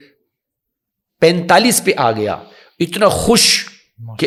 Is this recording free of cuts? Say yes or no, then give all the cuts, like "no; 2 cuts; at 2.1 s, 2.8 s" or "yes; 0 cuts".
yes; 0 cuts